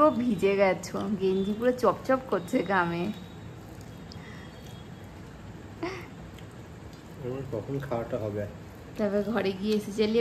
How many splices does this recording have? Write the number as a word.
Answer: zero